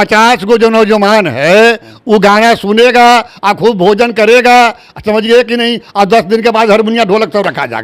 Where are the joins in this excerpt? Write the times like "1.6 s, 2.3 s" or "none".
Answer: none